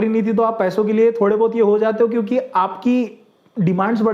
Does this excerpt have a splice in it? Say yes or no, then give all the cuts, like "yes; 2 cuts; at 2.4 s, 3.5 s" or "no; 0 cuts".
no; 0 cuts